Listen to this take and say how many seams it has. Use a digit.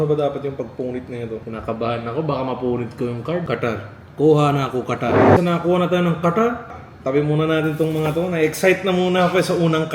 0